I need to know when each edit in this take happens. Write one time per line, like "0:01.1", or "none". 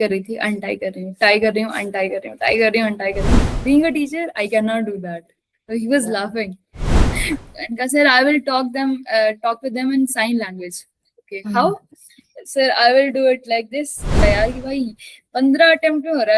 0:03.4
0:07.1
0:14.2